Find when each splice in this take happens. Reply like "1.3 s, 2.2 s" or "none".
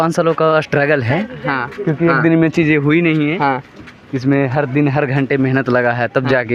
none